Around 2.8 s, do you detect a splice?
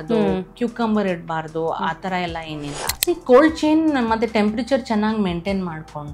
yes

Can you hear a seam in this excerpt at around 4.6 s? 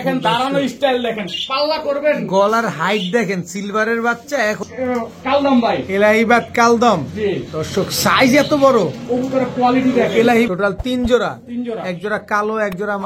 yes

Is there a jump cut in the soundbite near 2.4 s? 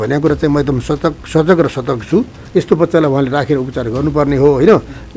yes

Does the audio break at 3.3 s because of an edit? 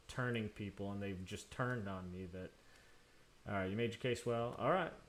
no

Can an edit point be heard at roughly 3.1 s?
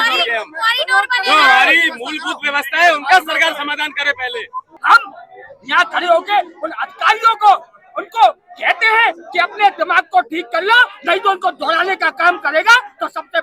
no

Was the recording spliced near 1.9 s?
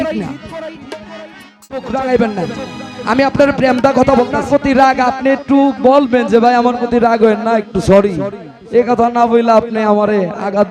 yes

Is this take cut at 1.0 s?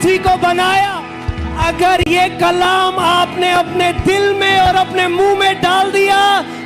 yes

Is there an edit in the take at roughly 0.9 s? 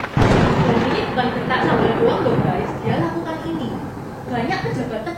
yes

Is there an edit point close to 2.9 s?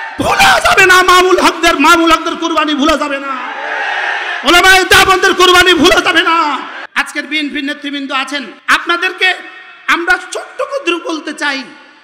no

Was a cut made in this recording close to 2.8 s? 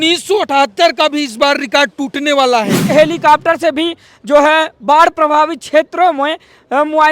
yes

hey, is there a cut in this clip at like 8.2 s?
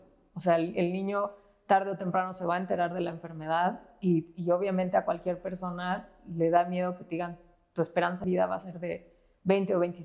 yes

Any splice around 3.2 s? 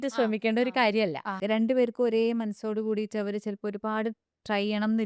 no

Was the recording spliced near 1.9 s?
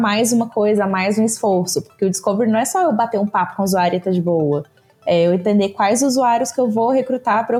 no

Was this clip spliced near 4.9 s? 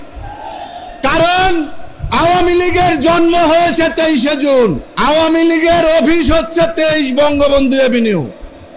yes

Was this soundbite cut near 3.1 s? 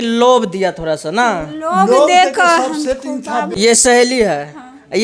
yes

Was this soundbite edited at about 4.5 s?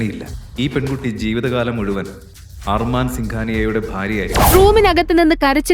yes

